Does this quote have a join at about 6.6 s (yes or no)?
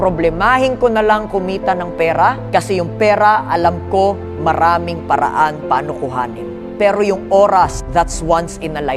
yes